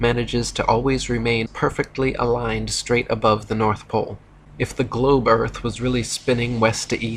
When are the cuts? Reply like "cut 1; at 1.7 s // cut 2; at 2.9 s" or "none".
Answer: none

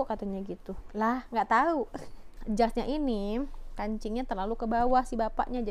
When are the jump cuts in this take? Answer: cut 1; at 2.3 s

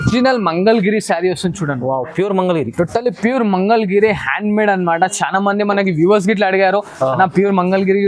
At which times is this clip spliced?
none

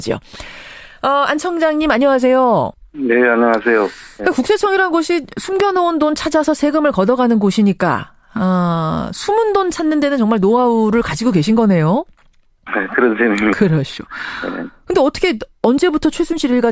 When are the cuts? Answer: none

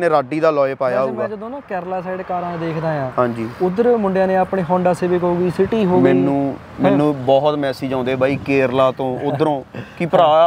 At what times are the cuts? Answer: none

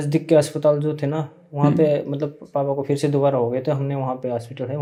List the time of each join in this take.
none

